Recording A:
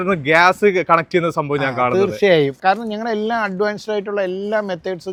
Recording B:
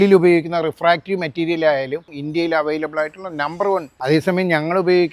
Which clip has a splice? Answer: B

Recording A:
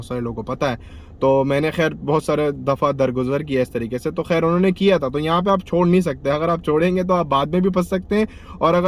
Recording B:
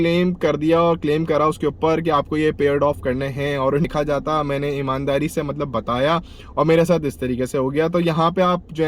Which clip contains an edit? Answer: B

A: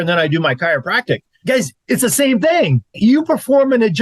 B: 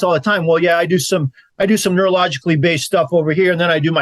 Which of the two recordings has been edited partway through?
A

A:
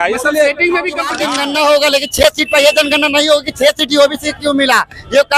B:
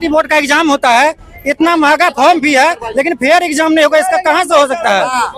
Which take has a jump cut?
A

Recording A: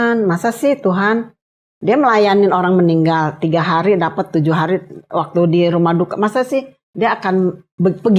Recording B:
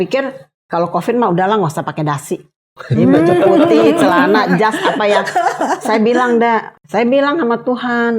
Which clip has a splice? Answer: B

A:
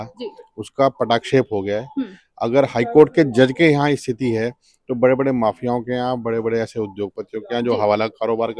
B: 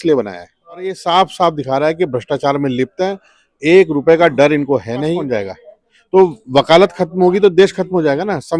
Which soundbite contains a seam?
B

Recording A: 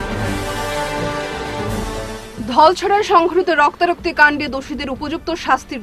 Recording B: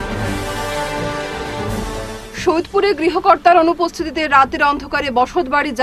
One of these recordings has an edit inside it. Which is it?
B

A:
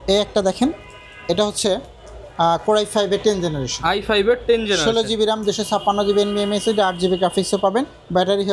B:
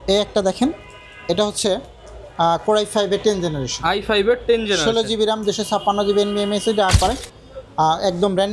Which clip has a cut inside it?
B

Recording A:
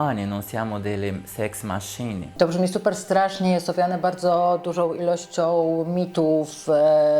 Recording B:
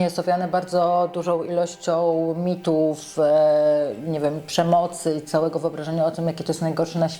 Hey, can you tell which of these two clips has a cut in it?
A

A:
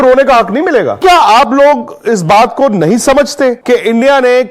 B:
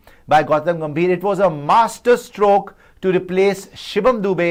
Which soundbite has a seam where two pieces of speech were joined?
A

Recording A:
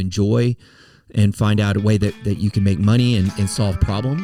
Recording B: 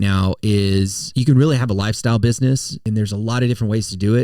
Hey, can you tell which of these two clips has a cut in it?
B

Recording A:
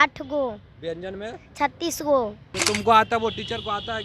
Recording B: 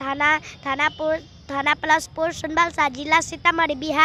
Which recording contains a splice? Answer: A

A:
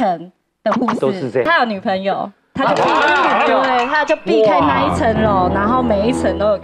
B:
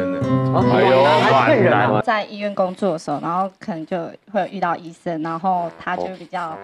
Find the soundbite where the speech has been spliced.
A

